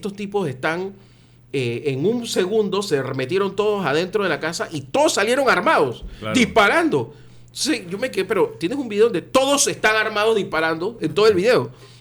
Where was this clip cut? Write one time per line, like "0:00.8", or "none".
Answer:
none

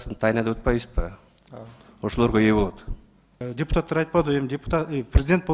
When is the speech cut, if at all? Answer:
0:03.5

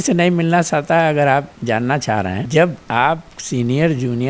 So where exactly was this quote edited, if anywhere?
0:02.4

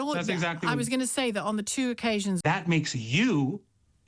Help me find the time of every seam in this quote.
0:02.4

